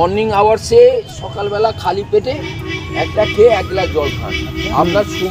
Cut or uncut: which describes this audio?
uncut